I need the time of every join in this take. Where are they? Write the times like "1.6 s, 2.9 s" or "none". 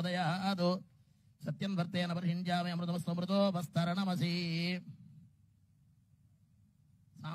1.8 s

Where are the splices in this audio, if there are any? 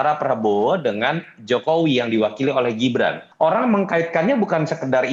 3.2 s

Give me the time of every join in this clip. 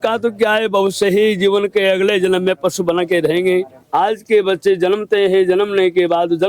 3.8 s

